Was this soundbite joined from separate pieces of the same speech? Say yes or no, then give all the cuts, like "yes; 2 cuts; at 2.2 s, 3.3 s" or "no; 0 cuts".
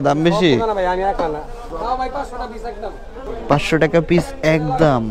yes; 2 cuts; at 1.6 s, 3.2 s